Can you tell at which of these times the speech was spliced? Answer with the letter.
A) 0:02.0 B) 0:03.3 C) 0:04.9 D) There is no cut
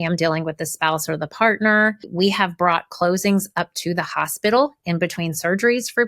A